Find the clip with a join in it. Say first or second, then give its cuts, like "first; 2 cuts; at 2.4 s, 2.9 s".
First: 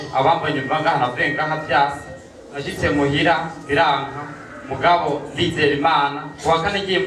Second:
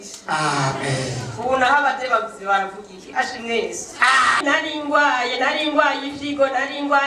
second; 1 cut; at 4.4 s